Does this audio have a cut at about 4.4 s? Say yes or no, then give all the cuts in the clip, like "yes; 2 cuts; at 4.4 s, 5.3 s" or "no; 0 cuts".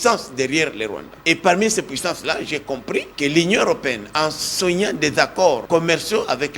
no; 3 cuts; at 1.1 s, 3.1 s, 5.6 s